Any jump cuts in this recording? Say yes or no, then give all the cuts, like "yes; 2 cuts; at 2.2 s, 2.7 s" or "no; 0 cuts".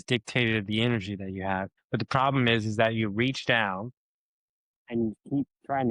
yes; 1 cut; at 1.8 s